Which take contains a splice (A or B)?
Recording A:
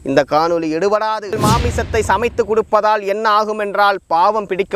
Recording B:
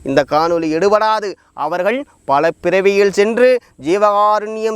A